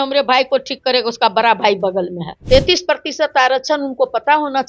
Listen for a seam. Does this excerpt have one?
yes; 1 cut; at 2.3 s

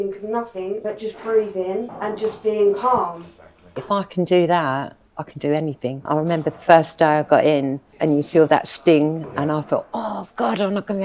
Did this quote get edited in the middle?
yes; 5 cuts; at 0.8 s, 1.9 s, 3.8 s, 6.1 s, 7.8 s

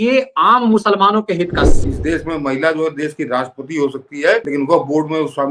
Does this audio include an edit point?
yes; 2 cuts; at 1.7 s, 4.5 s

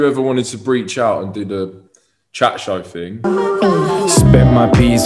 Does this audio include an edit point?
yes; 1 cut; at 3.1 s

